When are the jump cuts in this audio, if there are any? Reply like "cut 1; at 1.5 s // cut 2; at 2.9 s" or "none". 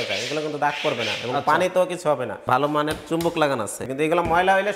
cut 1; at 2.3 s // cut 2; at 3.8 s